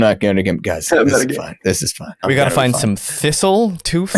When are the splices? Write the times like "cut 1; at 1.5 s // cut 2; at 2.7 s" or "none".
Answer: cut 1; at 2.2 s